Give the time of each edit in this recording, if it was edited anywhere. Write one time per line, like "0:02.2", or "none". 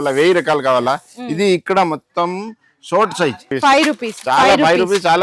0:03.5